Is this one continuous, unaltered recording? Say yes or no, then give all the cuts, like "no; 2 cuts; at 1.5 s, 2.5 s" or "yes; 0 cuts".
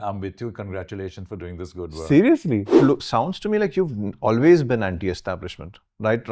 no; 1 cut; at 2.7 s